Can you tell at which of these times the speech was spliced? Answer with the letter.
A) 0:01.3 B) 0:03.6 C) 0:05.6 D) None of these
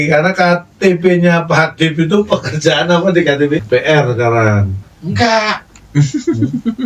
B